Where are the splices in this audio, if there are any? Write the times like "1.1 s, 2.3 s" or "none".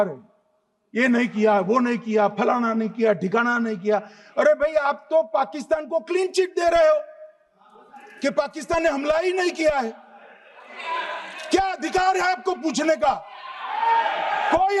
none